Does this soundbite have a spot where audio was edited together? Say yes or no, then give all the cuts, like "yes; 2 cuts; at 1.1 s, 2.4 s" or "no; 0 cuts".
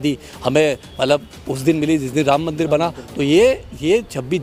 no; 0 cuts